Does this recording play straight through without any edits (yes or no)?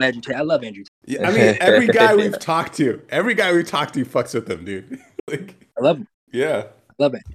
yes